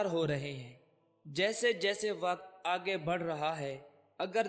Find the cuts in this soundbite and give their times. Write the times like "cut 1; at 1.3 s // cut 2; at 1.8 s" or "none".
none